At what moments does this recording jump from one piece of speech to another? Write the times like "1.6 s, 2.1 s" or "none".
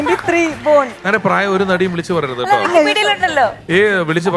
1.1 s